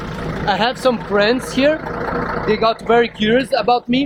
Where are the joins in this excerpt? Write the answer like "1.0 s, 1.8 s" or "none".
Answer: none

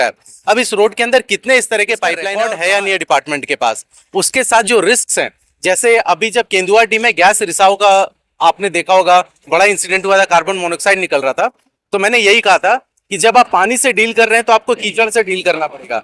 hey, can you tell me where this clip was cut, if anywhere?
2.2 s

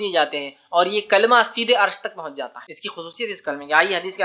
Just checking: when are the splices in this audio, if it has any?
3.1 s

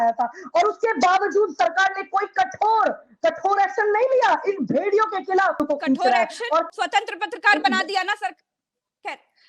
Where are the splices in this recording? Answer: 5.6 s, 6.7 s

